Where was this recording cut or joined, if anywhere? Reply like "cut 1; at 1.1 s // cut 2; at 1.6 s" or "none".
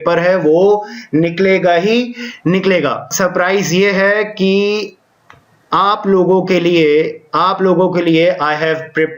cut 1; at 3.1 s